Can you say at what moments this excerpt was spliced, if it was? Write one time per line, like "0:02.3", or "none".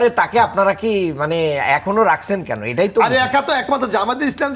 none